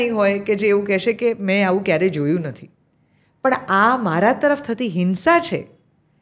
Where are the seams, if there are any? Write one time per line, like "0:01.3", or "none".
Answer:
none